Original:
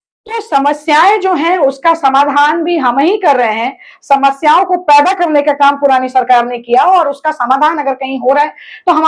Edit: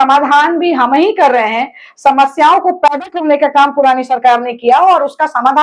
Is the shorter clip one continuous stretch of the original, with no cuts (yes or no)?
yes